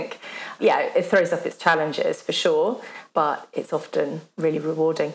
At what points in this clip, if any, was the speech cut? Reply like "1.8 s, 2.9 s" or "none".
4.2 s